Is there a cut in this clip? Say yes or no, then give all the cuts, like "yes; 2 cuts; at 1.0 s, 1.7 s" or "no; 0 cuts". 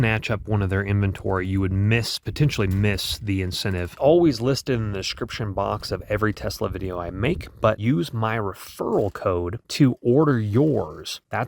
yes; 2 cuts; at 3.9 s, 7.8 s